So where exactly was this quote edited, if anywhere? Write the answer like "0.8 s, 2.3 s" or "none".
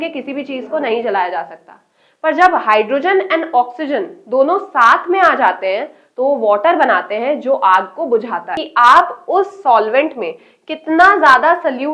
8.6 s